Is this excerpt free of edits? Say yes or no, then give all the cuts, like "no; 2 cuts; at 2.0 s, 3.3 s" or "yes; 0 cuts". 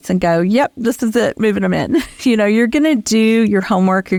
yes; 0 cuts